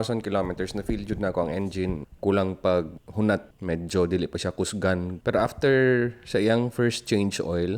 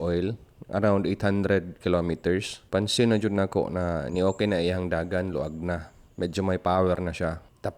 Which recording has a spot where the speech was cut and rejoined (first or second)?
first